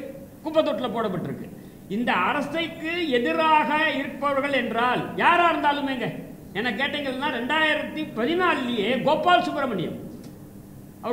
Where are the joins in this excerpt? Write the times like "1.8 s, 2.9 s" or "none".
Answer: none